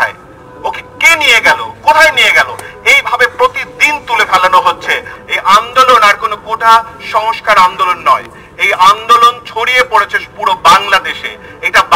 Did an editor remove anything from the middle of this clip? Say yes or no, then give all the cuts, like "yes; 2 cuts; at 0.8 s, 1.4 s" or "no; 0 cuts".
yes; 1 cut; at 5.1 s